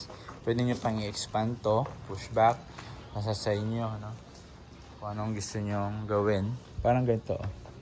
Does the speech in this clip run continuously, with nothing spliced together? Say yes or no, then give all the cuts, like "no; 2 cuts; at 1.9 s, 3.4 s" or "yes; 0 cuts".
yes; 0 cuts